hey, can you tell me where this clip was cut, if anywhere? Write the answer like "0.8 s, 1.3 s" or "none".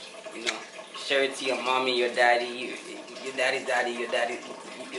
none